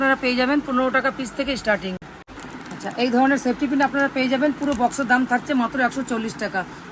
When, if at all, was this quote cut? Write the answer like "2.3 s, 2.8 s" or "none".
none